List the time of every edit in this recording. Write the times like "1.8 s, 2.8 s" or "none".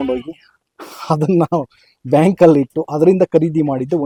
none